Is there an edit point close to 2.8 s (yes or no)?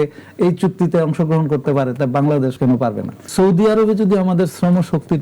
yes